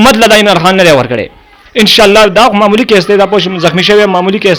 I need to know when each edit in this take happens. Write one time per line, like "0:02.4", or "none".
none